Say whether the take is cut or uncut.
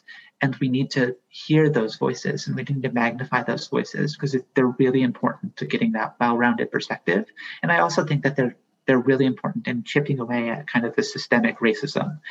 uncut